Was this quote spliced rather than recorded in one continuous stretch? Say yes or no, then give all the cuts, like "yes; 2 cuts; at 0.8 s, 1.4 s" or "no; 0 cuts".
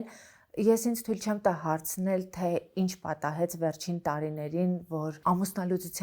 no; 0 cuts